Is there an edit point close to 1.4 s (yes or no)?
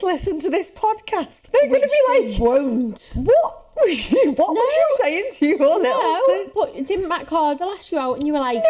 yes